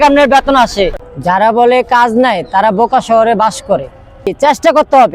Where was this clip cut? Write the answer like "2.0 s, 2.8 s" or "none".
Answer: 0.9 s, 4.3 s